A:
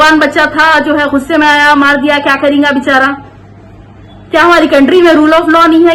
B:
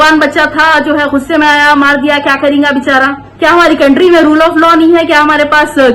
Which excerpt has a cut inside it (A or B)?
B